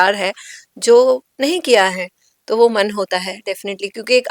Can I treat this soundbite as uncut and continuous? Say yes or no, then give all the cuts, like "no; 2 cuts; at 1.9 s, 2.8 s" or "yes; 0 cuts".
yes; 0 cuts